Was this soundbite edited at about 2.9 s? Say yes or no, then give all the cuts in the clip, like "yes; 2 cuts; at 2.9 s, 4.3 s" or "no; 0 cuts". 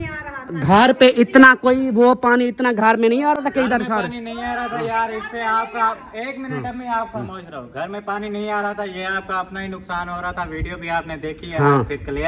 no; 0 cuts